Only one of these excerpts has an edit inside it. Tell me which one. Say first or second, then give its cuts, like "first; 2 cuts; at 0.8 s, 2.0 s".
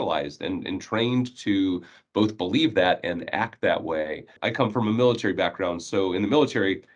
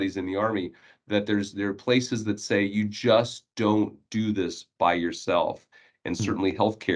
first; 1 cut; at 4.3 s